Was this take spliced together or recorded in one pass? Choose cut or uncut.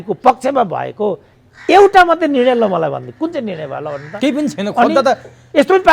uncut